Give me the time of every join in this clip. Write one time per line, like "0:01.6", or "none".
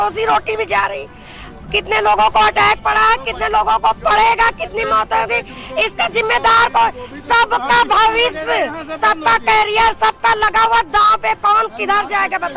none